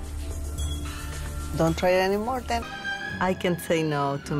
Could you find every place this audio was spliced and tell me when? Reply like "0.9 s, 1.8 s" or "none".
none